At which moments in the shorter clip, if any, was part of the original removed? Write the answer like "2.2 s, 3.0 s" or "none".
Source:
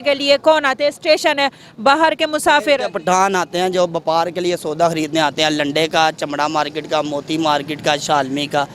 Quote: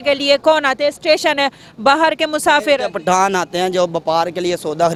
none

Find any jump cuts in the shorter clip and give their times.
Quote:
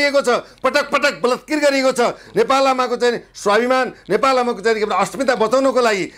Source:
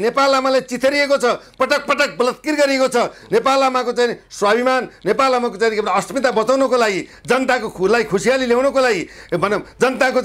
none

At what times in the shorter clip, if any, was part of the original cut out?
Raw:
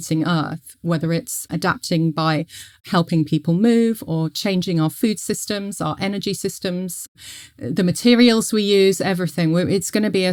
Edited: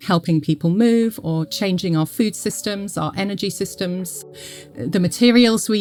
none

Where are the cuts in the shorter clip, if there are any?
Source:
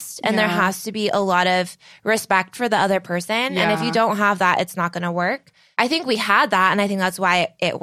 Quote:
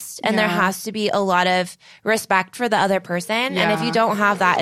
none

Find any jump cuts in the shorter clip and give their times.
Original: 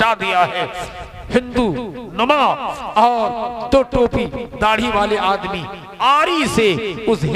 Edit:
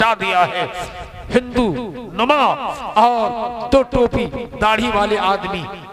none

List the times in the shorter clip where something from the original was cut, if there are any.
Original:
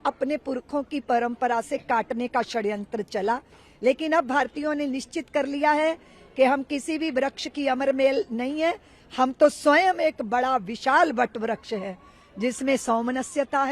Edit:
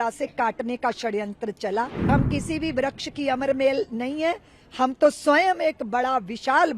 2.1 s

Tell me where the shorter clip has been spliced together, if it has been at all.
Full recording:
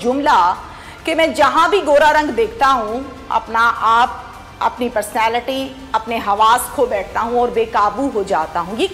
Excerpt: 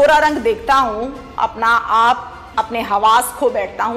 2.4 s

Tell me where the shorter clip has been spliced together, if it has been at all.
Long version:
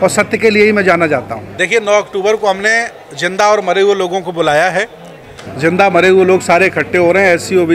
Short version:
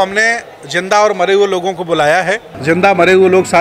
2.5 s

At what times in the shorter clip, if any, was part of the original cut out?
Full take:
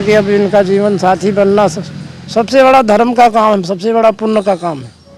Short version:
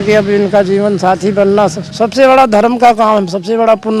1.8 s

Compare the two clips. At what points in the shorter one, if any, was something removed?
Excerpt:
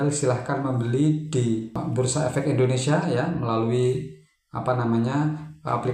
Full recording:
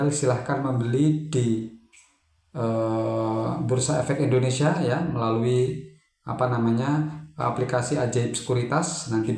1.8 s

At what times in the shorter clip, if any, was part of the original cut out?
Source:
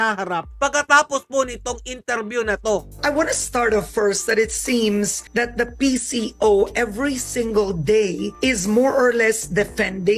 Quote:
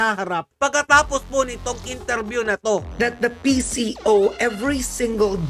2.9 s

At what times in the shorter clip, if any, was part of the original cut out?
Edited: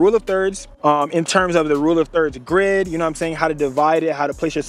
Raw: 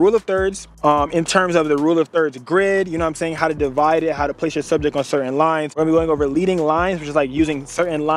none

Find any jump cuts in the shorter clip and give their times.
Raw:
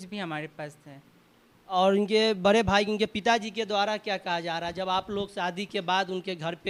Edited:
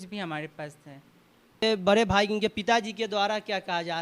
1.6 s

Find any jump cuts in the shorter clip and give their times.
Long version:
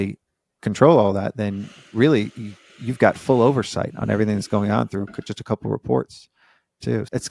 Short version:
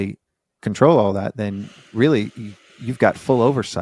none

